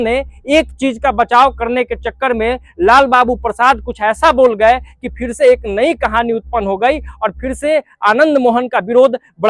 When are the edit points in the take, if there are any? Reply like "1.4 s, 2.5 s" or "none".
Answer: none

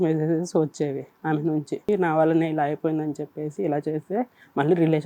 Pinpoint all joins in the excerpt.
1.8 s

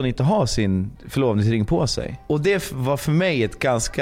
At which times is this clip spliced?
1.0 s, 2.1 s

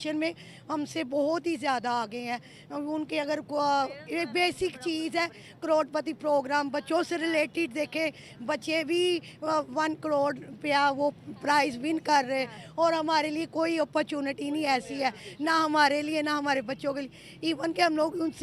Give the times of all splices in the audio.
none

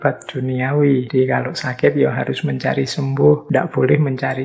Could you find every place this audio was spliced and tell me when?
1.1 s, 3.4 s

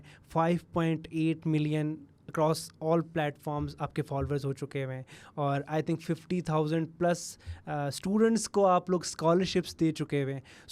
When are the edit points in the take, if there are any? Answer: none

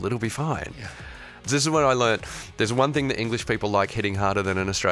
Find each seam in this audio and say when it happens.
1.4 s

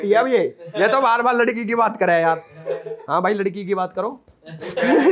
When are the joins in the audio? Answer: none

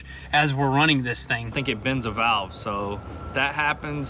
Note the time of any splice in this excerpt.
1.5 s

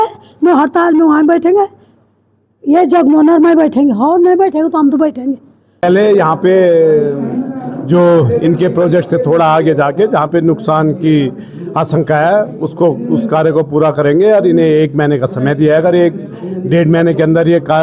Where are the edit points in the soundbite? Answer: 5.8 s

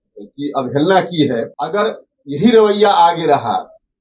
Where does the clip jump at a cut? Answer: 1.6 s

